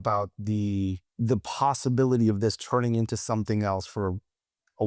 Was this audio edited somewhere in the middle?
yes; 1 cut; at 1.1 s

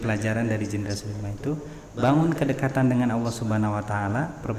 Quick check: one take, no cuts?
yes; 0 cuts

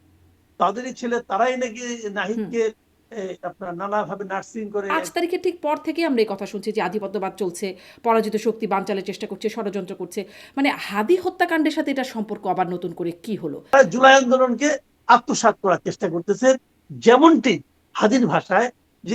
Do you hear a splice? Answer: yes; 2 cuts; at 4.9 s, 13.7 s

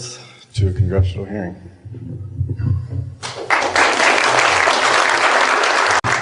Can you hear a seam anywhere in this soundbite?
no; 0 cuts

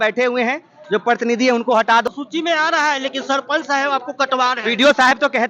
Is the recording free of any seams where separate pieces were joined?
no; 1 cut; at 2.0 s

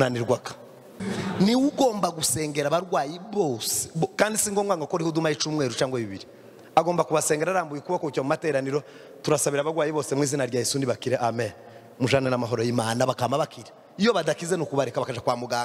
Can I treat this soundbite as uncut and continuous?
no; 1 cut; at 1.0 s

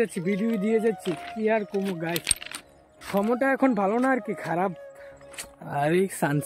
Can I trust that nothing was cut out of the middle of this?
yes; 0 cuts

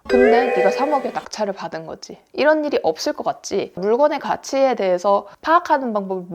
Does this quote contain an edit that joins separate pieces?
yes; 2 cuts; at 3.8 s, 5.3 s

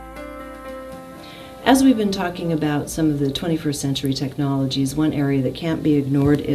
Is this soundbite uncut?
no; 1 cut; at 1.1 s

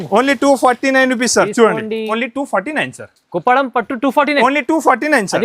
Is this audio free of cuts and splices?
no; 1 cut; at 2.1 s

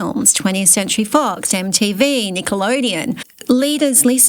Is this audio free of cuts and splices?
no; 1 cut; at 3.3 s

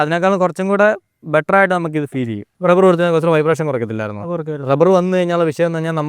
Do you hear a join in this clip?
yes; 1 cut; at 2.4 s

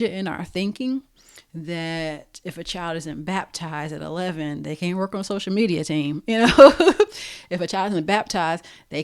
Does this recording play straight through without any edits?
yes; 0 cuts

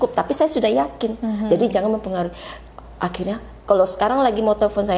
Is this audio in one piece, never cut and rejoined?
yes; 0 cuts

